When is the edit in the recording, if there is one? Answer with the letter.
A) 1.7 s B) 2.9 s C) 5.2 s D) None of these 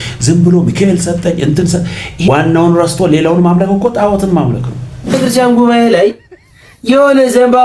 C